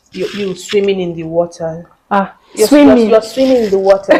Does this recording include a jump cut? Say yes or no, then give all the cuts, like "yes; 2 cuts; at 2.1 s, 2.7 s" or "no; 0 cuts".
no; 0 cuts